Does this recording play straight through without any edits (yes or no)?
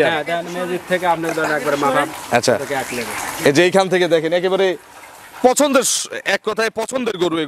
yes